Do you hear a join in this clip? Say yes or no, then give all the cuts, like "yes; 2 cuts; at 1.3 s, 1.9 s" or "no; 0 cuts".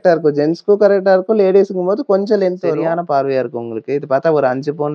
yes; 1 cut; at 2.8 s